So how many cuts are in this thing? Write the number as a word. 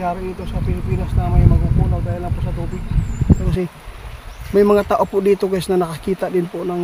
one